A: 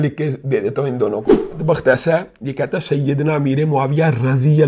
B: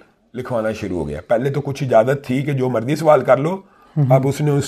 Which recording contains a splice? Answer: A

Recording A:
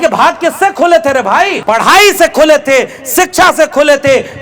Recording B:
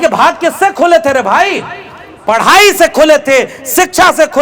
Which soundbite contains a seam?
A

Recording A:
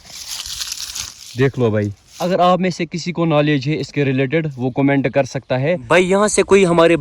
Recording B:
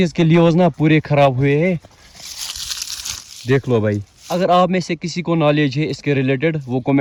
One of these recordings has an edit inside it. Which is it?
A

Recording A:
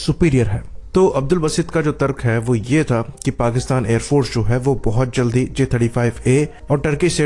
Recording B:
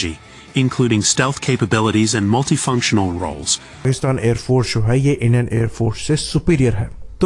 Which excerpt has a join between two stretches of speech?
B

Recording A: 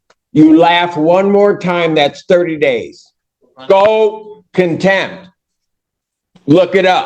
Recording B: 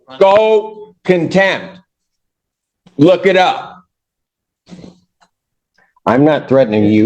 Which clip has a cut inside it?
B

